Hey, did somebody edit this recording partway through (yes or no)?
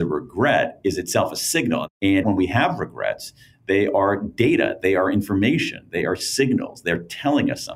yes